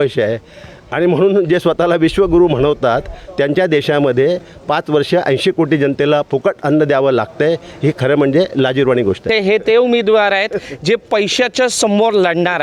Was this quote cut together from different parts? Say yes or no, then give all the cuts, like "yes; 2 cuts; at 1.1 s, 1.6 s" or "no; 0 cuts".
yes; 1 cut; at 9.4 s